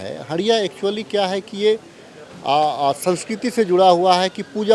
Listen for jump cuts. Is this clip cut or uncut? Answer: uncut